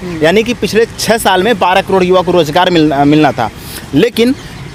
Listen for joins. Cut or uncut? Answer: uncut